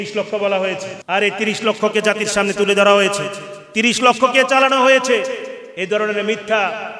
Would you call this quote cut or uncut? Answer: cut